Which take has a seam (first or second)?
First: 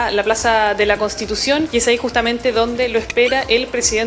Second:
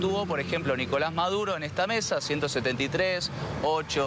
first